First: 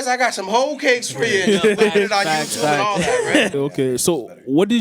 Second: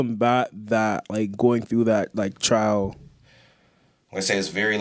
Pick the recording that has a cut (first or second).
first